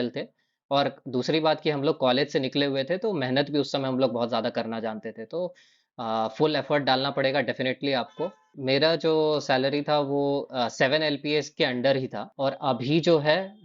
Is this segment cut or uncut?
cut